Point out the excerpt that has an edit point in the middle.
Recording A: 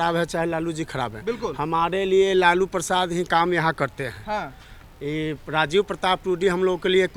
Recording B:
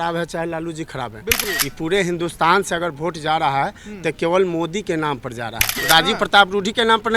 B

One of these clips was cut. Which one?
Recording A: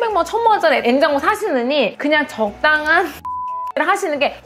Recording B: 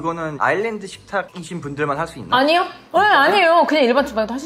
A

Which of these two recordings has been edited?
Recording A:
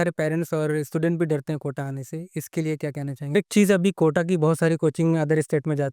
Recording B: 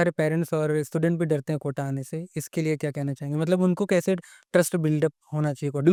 A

